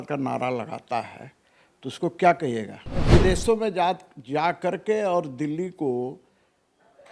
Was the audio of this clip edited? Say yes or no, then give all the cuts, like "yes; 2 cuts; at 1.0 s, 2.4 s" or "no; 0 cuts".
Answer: yes; 1 cut; at 3.0 s